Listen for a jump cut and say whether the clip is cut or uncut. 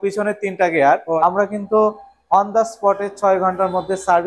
cut